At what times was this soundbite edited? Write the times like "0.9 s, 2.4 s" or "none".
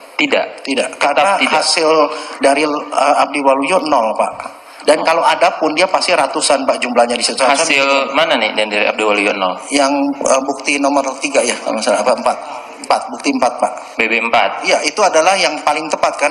none